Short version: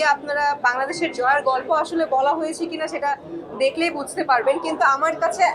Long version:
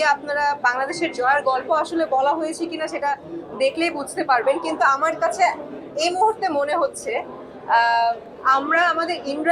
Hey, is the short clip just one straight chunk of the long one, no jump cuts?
yes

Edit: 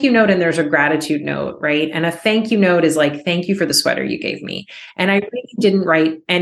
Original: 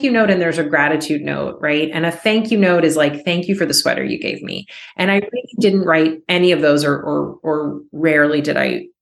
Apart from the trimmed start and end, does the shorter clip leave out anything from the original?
no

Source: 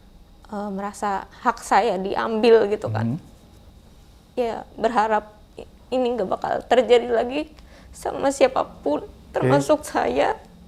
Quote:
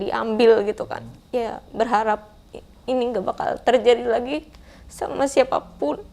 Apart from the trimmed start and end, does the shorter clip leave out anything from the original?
yes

